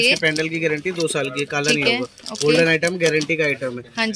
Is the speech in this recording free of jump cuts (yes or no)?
yes